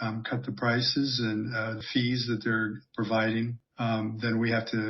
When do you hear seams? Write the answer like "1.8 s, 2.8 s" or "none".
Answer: 1.8 s, 3.6 s